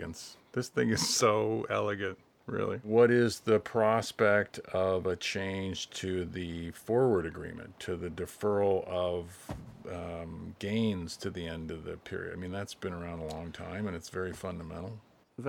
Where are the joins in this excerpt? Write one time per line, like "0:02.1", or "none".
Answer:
0:02.8